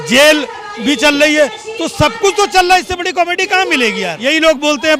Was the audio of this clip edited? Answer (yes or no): yes